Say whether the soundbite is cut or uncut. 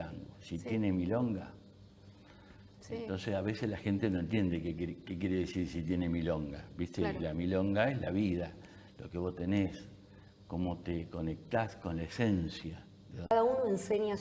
cut